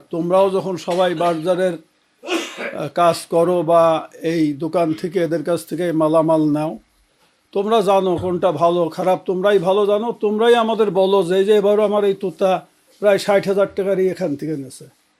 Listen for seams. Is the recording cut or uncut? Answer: uncut